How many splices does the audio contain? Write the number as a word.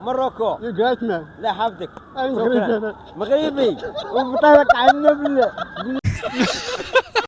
zero